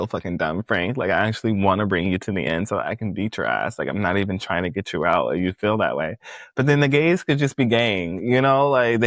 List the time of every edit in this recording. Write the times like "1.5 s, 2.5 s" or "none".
none